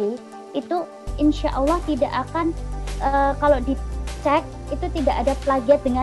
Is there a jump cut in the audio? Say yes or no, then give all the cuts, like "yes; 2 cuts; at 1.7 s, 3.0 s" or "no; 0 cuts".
no; 0 cuts